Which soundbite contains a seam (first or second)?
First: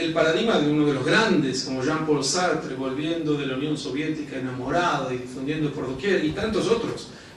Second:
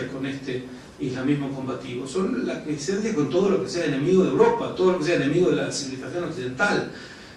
second